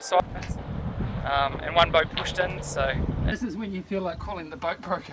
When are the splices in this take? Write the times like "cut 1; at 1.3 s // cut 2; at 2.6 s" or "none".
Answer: cut 1; at 3.0 s